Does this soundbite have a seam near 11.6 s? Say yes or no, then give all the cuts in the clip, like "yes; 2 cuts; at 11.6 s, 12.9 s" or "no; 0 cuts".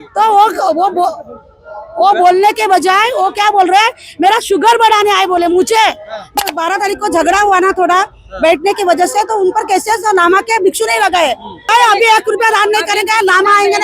yes; 2 cuts; at 6.4 s, 11.6 s